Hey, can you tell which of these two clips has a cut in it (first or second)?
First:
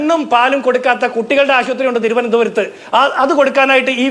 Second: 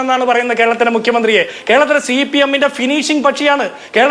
second